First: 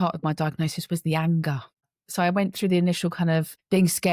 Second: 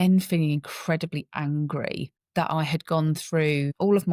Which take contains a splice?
first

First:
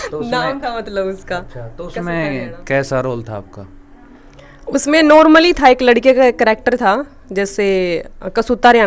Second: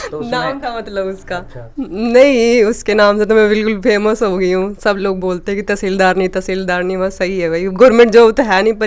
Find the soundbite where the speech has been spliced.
second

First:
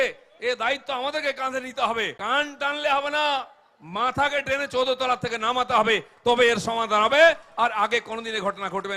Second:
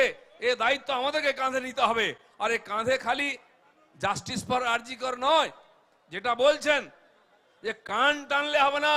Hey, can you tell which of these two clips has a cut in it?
first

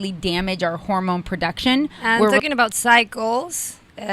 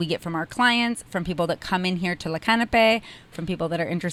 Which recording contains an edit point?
first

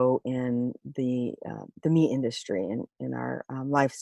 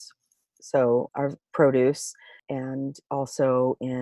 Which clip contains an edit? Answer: second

